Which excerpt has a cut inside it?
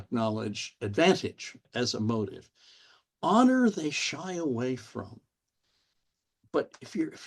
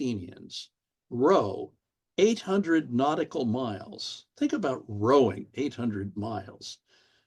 first; 1 cut; at 1.6 s

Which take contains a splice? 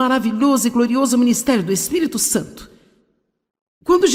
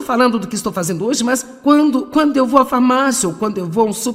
second; 1 cut; at 1.2 s

